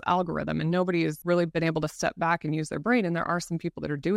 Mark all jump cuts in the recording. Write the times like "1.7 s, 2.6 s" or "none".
1.3 s